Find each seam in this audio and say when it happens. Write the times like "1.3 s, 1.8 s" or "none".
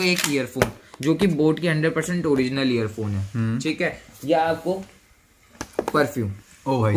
none